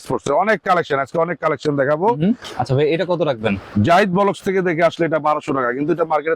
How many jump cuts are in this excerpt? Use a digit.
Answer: 2